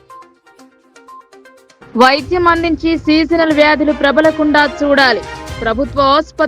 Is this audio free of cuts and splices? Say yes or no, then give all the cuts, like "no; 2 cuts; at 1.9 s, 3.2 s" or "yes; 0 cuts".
no; 1 cut; at 1.3 s